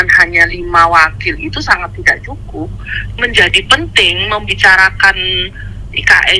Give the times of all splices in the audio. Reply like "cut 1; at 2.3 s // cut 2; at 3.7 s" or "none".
cut 1; at 2.9 s